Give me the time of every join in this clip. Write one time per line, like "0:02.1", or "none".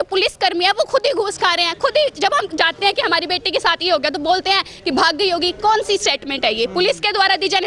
none

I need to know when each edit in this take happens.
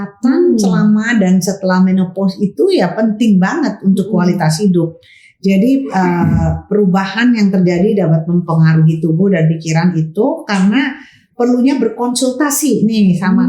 none

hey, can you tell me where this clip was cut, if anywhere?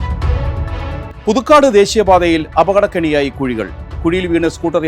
0:01.1

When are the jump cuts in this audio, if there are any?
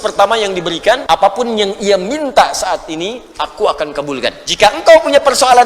0:01.0
0:04.4

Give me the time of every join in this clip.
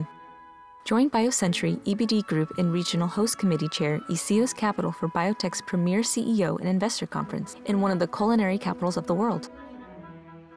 0:09.4

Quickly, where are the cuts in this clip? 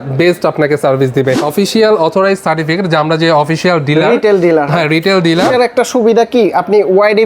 0:01.4
0:05.5

